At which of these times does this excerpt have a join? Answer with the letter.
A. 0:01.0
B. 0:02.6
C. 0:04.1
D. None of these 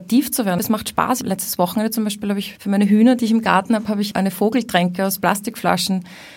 A